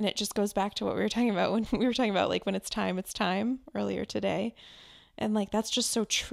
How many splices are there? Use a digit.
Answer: 0